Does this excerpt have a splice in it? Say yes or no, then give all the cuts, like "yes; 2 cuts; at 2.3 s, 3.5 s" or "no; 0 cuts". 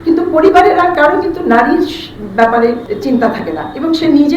yes; 1 cut; at 2.9 s